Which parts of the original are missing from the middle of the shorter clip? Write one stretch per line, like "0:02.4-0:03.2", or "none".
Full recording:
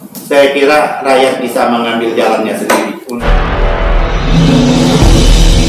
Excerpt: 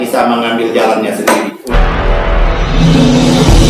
0:03.1-0:03.2